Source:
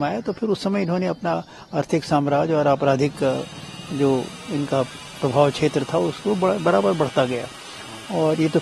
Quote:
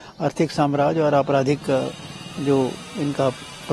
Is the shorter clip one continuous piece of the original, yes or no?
yes